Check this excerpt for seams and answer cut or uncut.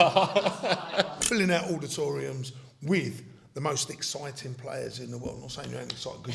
cut